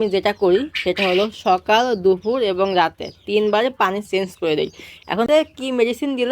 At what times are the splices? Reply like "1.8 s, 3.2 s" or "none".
5.3 s